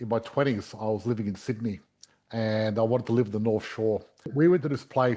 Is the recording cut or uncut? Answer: cut